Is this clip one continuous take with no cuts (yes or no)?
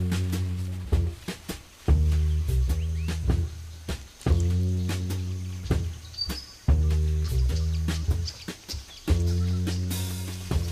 no